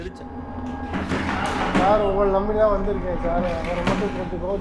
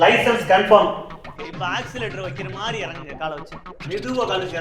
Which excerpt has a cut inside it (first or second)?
second